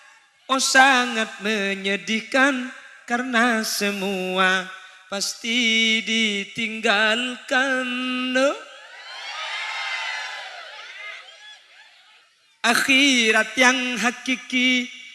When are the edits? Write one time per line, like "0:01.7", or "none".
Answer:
0:12.3